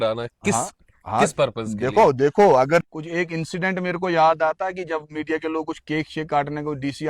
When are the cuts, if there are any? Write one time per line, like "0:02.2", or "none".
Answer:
0:02.9